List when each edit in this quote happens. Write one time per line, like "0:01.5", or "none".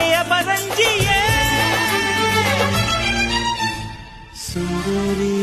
none